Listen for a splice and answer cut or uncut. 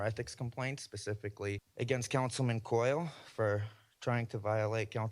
cut